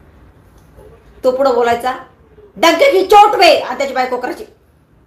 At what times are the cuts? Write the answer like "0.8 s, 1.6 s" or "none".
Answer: none